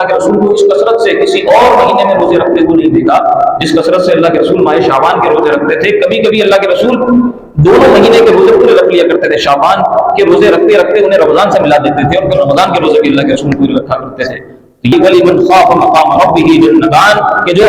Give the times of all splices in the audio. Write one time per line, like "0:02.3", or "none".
0:14.9

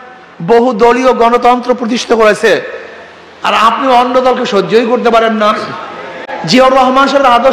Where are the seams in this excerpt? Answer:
0:06.3

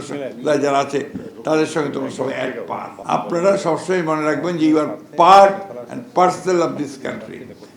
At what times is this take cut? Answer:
0:02.9

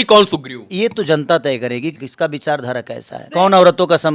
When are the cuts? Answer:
0:02.0
0:03.2

